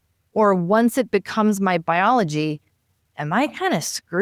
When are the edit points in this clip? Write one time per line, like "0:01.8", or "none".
none

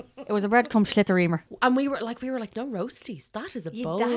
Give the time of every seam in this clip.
0:01.5

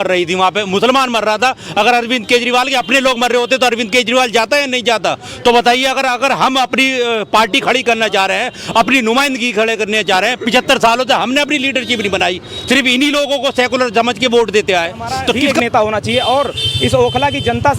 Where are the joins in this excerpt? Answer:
0:15.5

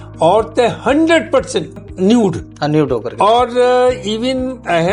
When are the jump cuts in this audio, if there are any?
0:01.8

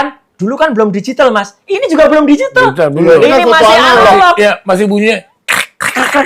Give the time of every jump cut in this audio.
none

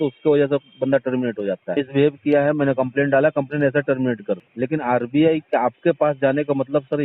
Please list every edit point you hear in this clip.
0:01.7
0:04.5

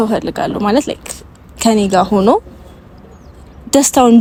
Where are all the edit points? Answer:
none

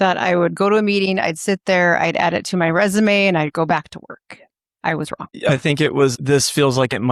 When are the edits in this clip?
0:05.4
0:06.2

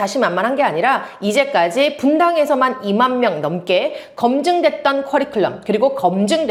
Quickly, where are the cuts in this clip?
none

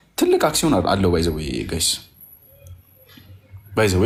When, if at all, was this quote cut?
none

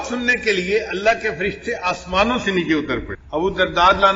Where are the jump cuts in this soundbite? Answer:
0:03.2

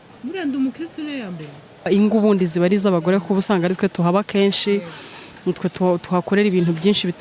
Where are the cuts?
0:01.8

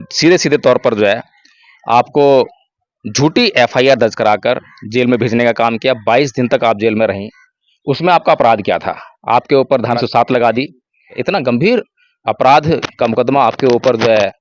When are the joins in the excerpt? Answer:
0:10.0
0:11.1

